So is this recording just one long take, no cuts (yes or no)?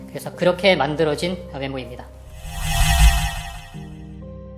no